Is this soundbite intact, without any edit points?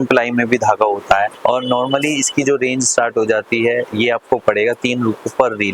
no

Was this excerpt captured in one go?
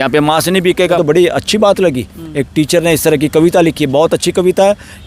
no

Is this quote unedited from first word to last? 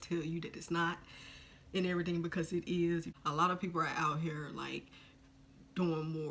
no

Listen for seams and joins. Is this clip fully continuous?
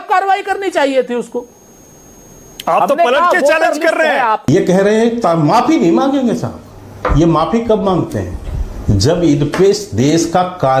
no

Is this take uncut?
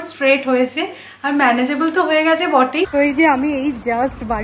no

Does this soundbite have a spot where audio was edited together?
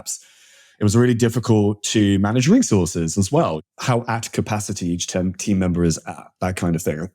yes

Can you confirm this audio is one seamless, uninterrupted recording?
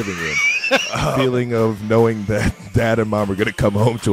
no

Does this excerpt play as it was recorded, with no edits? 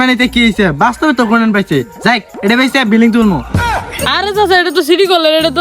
no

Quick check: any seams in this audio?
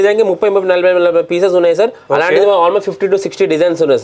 no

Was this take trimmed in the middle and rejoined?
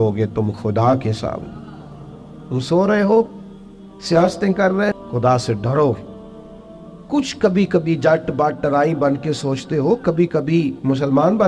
yes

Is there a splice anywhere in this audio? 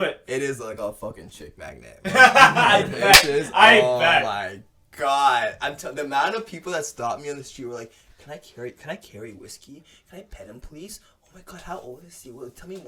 no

